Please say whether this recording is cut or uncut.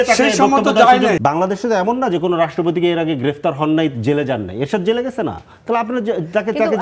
cut